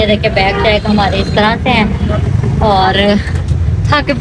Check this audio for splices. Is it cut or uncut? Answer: uncut